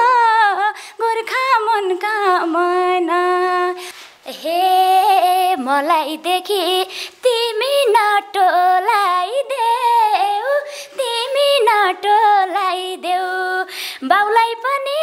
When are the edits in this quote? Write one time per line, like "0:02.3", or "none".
0:03.9